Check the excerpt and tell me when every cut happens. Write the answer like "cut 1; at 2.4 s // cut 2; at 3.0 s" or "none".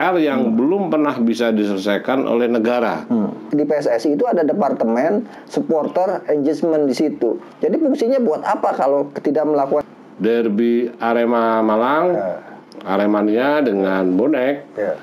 cut 1; at 3.4 s // cut 2; at 9.8 s

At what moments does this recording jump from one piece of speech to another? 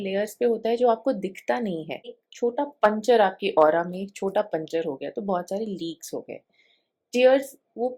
cut 1; at 2.2 s

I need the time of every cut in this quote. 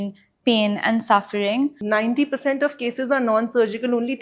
cut 1; at 1.8 s

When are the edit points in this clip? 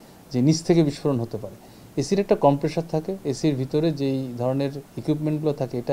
none

